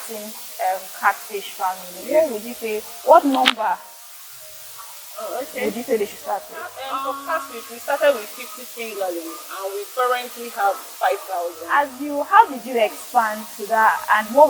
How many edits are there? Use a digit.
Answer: 2